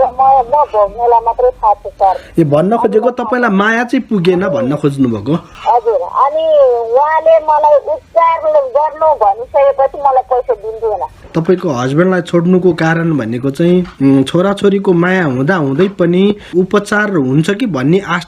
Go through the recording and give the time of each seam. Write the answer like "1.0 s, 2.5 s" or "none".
5.5 s, 11.2 s, 16.5 s